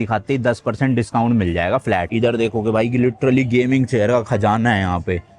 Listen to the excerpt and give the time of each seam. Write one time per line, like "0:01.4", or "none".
0:02.1